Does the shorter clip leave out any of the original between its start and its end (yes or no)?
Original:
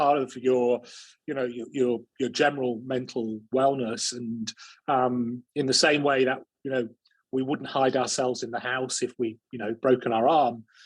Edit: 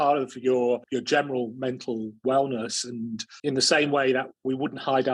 yes